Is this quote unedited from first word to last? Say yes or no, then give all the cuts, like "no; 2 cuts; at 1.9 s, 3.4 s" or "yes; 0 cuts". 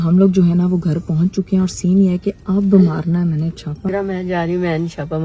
no; 1 cut; at 3.9 s